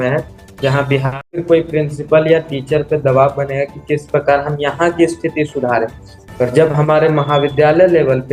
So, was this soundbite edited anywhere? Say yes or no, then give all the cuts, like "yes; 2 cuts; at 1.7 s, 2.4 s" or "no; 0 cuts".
yes; 1 cut; at 1.3 s